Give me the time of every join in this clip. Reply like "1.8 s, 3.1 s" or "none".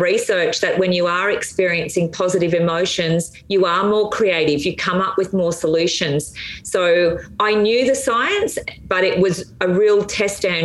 none